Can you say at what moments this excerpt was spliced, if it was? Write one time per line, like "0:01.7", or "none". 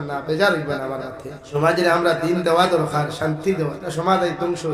0:01.5
0:03.8